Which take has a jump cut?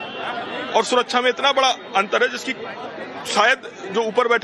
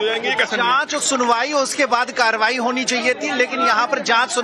second; 1 cut; at 2.5 s

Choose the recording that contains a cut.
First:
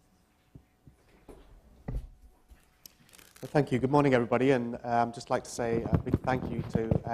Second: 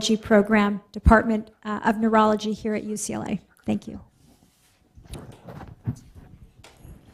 second; 1 cut; at 6.0 s

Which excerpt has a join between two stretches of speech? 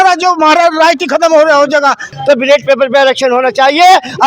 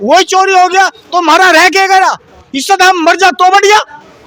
first; 1 cut; at 2.1 s

